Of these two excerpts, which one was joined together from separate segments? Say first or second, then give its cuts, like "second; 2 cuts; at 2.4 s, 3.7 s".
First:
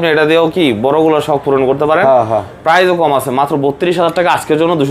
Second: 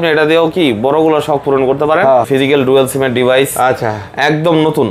second; 1 cut; at 2.3 s